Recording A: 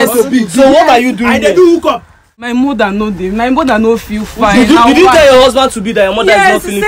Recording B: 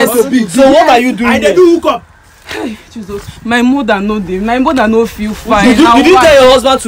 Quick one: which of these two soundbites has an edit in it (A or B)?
A